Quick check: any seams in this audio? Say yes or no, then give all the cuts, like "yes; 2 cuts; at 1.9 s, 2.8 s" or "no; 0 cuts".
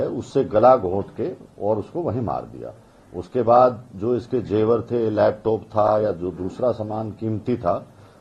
no; 0 cuts